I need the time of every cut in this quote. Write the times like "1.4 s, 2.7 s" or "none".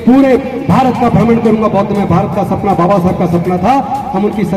none